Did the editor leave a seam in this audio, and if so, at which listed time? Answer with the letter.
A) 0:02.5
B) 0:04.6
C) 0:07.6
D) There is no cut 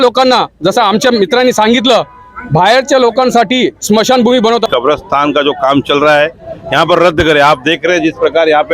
B